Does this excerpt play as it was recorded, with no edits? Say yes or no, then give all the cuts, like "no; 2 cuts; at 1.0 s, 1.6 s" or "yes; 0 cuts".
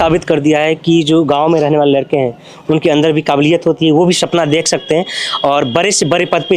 yes; 0 cuts